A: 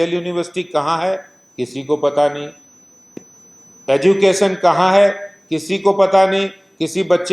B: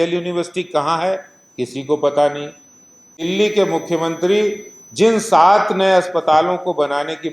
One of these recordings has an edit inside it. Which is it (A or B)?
B